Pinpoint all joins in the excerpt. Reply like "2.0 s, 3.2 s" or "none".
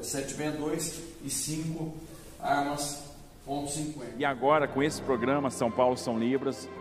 4.1 s